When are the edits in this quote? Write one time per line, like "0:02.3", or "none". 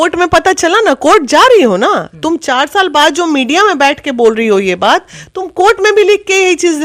none